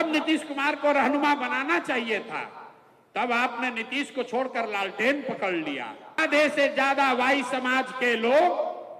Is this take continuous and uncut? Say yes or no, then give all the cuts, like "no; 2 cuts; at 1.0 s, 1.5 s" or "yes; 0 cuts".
no; 1 cut; at 6.2 s